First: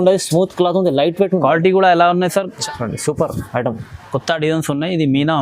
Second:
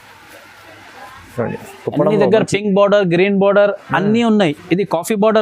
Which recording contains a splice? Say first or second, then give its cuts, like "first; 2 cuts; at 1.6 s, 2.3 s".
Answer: first; 1 cut; at 2.6 s